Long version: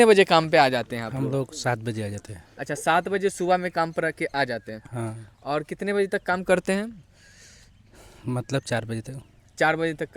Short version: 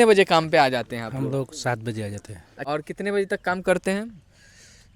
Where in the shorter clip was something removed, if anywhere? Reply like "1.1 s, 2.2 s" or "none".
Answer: 2.5 s